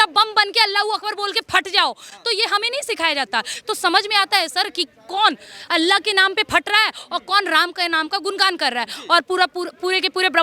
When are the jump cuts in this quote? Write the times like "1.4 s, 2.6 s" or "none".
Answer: none